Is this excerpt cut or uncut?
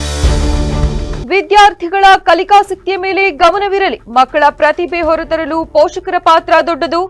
uncut